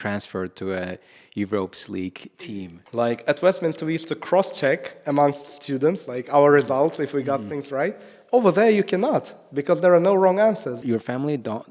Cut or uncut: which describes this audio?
cut